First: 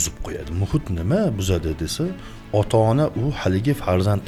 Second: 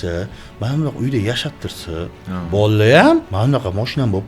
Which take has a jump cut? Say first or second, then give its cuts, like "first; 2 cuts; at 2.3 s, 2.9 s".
second; 2 cuts; at 2.2 s, 3.3 s